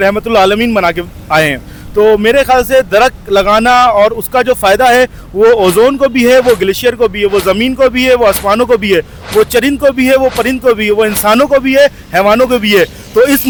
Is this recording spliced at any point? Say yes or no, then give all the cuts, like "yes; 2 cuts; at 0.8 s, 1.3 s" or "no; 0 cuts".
no; 0 cuts